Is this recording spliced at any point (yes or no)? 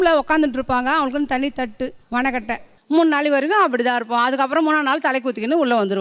no